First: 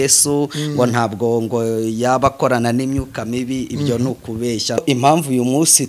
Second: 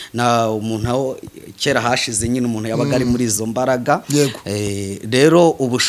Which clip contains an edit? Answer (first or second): first